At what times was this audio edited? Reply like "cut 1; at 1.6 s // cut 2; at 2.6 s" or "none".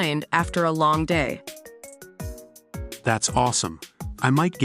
cut 1; at 1.4 s // cut 2; at 3.0 s